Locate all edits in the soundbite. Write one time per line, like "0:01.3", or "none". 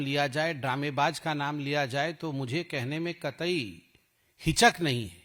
none